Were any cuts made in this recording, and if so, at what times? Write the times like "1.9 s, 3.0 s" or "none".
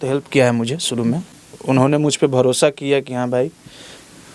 1.3 s